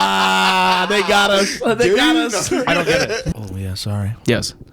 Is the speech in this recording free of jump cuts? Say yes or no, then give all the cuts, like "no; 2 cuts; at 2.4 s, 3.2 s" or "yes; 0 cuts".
no; 1 cut; at 3.2 s